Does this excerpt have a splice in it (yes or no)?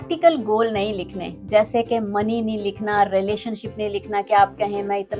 no